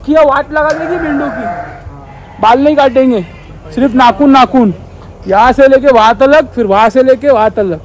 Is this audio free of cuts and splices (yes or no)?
yes